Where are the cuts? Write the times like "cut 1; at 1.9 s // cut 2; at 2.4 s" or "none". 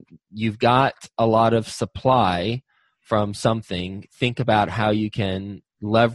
none